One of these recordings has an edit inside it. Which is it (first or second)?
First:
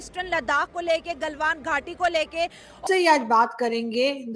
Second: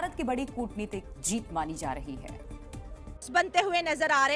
first